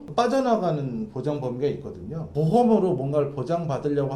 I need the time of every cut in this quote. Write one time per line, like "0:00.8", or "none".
0:02.3